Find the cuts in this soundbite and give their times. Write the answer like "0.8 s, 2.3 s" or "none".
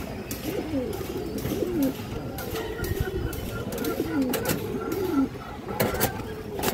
none